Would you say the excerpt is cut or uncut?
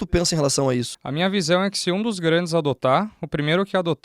cut